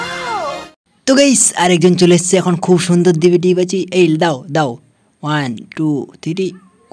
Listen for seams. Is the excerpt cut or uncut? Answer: uncut